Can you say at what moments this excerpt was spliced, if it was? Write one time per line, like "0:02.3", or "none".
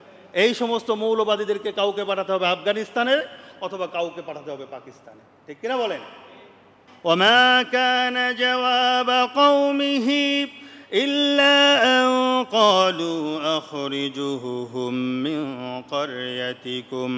0:06.8